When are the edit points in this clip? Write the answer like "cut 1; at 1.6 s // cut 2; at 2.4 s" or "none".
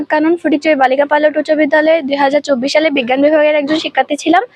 none